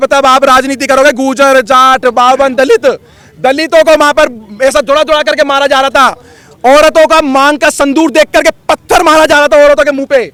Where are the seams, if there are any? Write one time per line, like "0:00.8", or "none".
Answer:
none

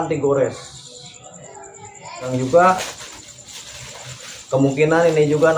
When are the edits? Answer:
0:02.3

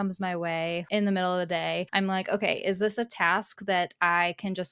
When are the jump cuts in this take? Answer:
0:00.8
0:01.9

